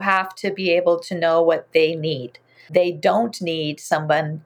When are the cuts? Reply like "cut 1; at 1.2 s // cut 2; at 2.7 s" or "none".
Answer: cut 1; at 2.6 s